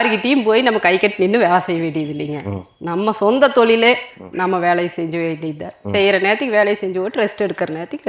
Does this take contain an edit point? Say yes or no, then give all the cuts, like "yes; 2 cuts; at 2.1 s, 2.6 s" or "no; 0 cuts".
no; 0 cuts